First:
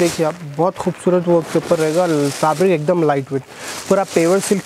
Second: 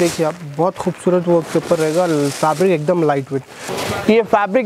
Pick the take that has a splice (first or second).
second